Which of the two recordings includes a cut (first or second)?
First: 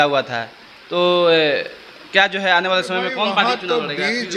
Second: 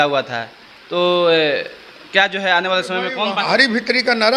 second